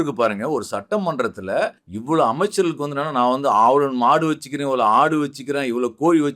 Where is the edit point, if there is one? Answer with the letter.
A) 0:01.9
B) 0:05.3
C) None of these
A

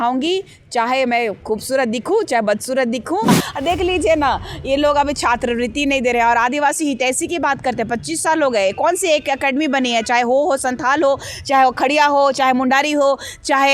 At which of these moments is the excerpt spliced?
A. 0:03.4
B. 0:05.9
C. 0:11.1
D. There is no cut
A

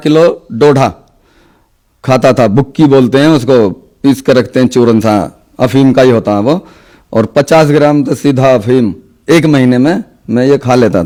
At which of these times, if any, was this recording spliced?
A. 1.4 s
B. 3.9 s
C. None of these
C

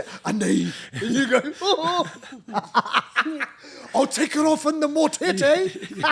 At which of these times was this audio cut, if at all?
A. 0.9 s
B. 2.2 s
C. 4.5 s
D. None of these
D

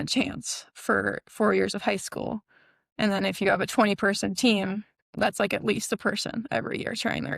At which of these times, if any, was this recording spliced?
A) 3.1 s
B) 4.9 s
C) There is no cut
B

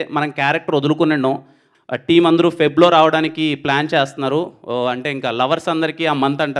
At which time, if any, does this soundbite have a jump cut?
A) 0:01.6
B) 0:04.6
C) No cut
A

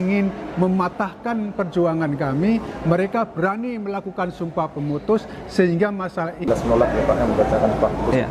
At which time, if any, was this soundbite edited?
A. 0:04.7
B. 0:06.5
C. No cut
B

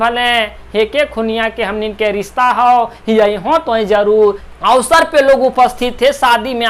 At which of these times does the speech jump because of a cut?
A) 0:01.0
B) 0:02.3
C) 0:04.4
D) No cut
C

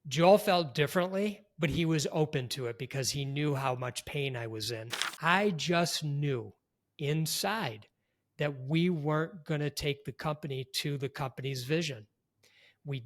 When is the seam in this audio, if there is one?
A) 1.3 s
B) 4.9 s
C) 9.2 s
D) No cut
B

